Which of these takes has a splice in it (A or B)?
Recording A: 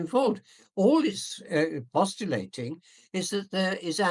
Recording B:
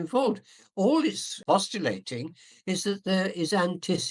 B